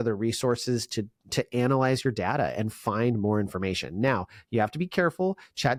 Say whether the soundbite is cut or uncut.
uncut